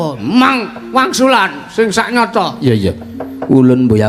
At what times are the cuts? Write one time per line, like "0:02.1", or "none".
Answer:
none